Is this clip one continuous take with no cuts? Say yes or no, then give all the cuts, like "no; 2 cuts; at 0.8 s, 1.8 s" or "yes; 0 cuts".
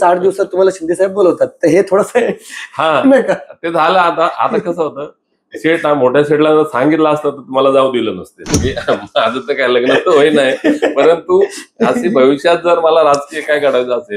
no; 1 cut; at 8.6 s